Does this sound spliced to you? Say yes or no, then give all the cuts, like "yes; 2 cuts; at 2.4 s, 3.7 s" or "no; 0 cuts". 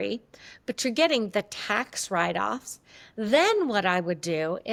no; 0 cuts